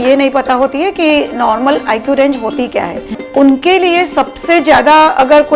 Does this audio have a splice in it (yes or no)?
yes